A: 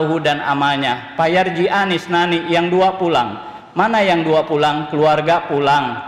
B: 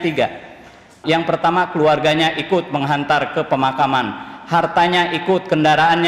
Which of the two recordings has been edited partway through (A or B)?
B